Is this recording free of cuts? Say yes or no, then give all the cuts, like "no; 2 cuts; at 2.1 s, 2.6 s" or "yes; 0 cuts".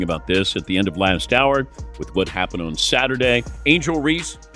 no; 1 cut; at 3.5 s